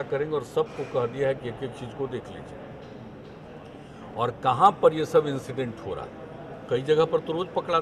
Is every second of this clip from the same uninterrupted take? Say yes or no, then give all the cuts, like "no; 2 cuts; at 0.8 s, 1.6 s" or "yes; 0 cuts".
yes; 0 cuts